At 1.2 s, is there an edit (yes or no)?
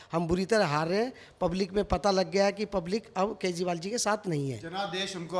no